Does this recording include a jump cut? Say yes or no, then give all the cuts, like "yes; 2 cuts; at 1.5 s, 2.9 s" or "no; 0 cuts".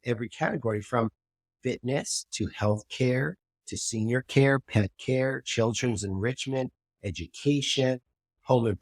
no; 0 cuts